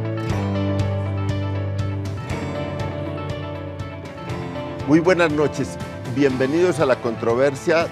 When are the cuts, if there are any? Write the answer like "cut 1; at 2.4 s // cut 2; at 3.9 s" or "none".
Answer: cut 1; at 3.9 s

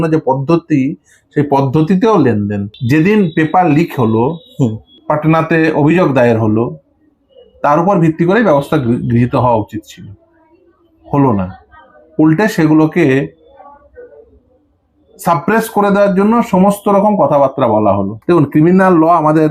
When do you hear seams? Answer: cut 1; at 2.7 s // cut 2; at 4.9 s // cut 3; at 18.1 s

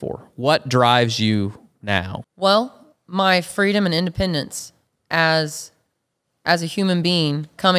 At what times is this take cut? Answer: cut 1; at 2.2 s

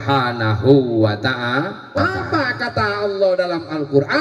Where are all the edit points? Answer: cut 1; at 2.0 s

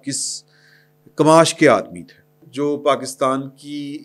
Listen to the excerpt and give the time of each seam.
cut 1; at 2.5 s

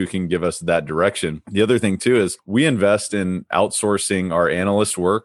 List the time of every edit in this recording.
cut 1; at 1.4 s // cut 2; at 2.4 s

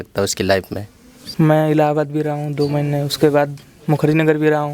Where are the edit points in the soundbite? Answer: cut 1; at 1.2 s

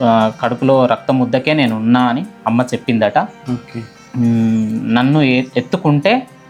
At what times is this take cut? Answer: none

